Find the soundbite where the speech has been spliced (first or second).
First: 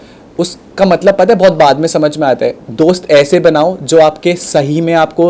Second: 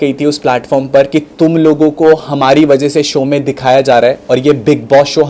first